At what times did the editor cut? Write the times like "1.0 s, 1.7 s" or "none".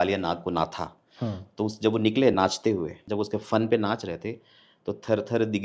3.0 s